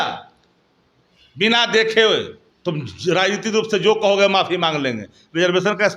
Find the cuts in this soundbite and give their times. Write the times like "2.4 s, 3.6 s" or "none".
2.4 s